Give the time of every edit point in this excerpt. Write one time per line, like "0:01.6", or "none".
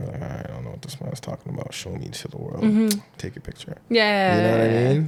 none